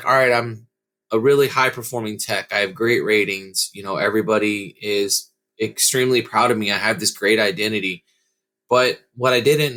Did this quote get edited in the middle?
no; 0 cuts

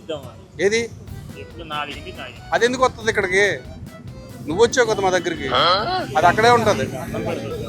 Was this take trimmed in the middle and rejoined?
yes; 1 cut; at 3.8 s

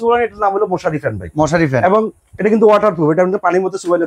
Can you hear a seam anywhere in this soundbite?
no; 0 cuts

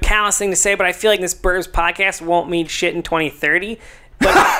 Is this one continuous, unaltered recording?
no; 1 cut; at 1.2 s

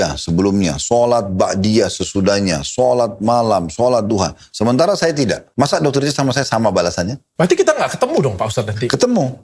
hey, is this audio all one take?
no; 2 cuts; at 5.4 s, 7.2 s

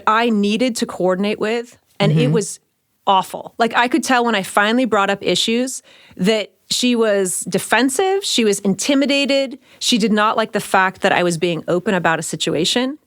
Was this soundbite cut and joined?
no; 0 cuts

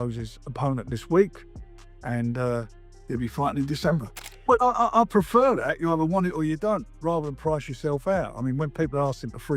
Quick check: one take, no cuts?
no; 1 cut; at 4.3 s

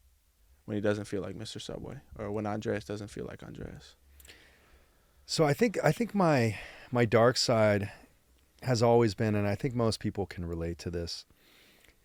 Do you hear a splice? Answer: no; 0 cuts

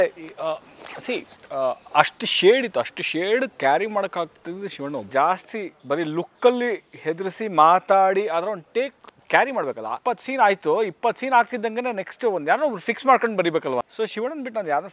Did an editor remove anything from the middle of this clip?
yes; 3 cuts; at 5.1 s, 10.0 s, 13.8 s

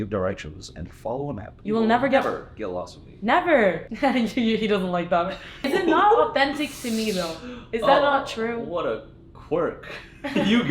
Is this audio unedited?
no; 3 cuts; at 1.5 s, 3.9 s, 5.7 s

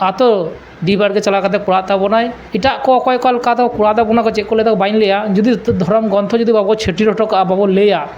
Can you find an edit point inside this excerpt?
yes; 1 cut; at 2.4 s

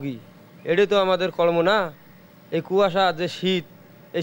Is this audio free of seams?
yes; 0 cuts

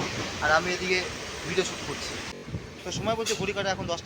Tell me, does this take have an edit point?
yes; 1 cut; at 2.3 s

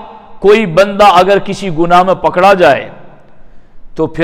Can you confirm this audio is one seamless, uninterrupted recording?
yes; 0 cuts

